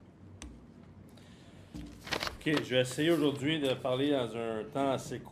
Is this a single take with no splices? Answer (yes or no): yes